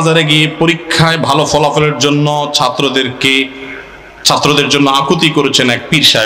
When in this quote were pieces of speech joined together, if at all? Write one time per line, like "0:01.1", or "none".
none